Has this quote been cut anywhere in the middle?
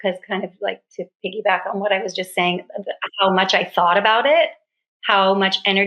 no; 0 cuts

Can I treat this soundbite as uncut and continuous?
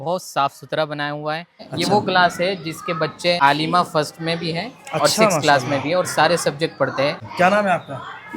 no; 3 cuts; at 1.7 s, 3.4 s, 7.2 s

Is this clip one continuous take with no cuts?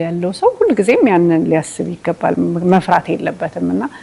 yes; 0 cuts

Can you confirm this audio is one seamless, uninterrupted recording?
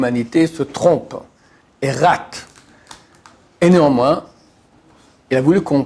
yes; 0 cuts

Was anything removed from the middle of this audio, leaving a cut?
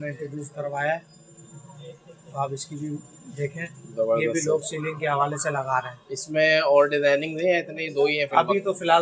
no; 0 cuts

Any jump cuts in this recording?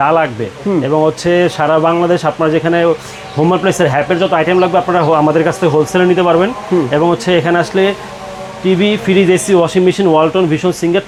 no; 0 cuts

